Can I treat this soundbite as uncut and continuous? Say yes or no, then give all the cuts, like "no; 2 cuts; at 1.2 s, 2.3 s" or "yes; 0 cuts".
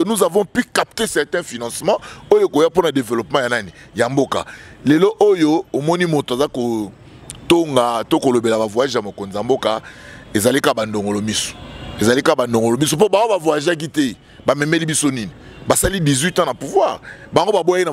yes; 0 cuts